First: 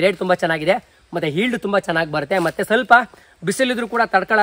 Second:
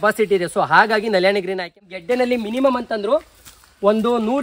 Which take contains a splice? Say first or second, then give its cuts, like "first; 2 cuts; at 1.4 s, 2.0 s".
second; 1 cut; at 1.8 s